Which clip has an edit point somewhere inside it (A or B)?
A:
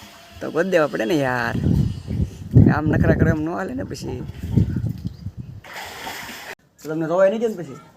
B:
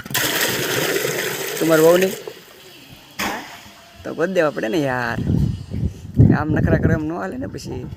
A